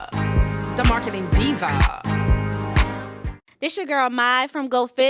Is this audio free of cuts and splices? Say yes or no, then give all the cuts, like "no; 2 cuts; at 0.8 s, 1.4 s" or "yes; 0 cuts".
no; 2 cuts; at 1.1 s, 3.4 s